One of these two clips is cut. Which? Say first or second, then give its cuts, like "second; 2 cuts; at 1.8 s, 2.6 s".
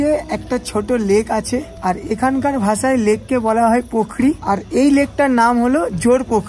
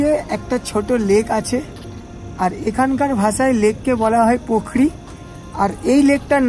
first; 2 cuts; at 1.7 s, 4.4 s